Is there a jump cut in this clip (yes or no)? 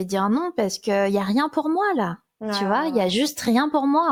no